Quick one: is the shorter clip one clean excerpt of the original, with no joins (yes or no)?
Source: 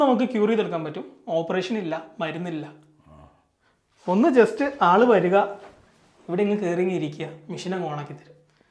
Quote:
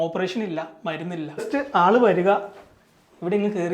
no